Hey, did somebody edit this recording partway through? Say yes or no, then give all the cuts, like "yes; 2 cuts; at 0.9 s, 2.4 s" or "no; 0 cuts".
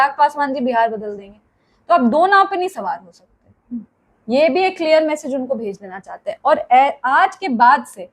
no; 0 cuts